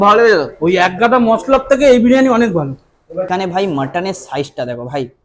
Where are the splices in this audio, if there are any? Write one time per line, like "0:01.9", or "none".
0:03.2